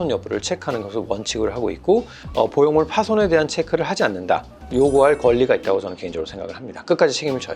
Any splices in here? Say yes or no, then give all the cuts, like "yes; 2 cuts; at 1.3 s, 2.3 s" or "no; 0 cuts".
yes; 2 cuts; at 2.2 s, 4.6 s